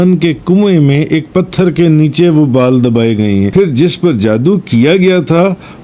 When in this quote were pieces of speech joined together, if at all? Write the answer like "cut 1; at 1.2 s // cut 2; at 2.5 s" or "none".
cut 1; at 3.5 s